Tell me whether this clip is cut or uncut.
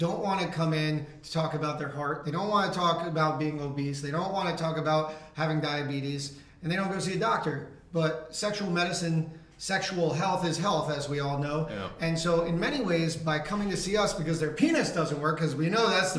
uncut